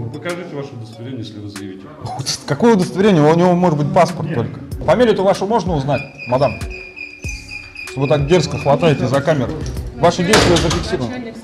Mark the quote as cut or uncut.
cut